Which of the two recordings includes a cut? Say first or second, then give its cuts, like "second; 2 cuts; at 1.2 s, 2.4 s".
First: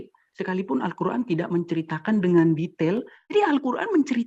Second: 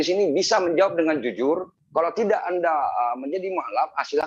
first; 1 cut; at 3.3 s